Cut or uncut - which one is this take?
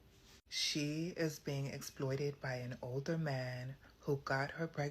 uncut